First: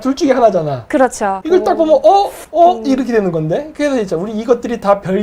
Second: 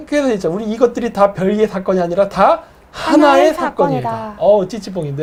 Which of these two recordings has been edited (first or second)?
first